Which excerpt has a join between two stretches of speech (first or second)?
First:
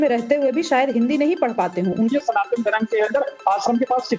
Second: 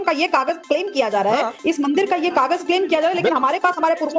first